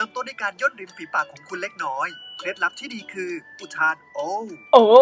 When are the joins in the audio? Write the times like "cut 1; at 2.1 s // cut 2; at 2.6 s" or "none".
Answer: none